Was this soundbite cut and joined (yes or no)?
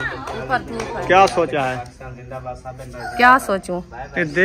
no